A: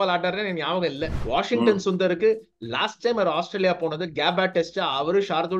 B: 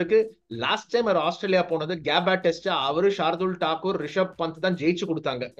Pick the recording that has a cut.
A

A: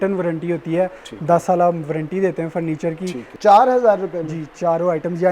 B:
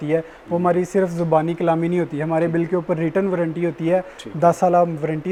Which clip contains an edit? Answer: A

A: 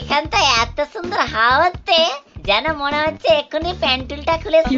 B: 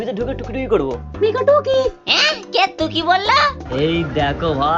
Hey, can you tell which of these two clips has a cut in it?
B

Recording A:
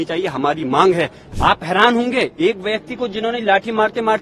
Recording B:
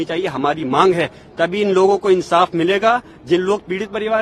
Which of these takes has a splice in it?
A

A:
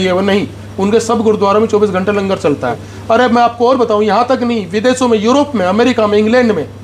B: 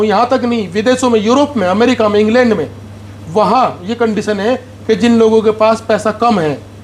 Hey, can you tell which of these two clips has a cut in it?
A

